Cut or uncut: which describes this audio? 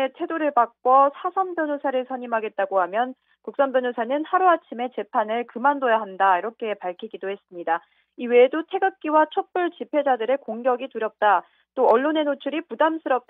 uncut